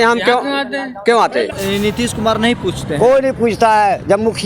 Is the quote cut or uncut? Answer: cut